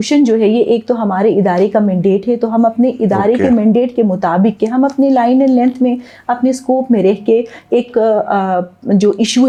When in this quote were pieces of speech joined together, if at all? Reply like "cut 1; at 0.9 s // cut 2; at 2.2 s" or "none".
none